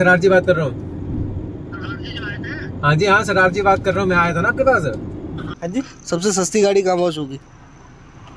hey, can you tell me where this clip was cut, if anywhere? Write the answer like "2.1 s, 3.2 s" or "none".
5.5 s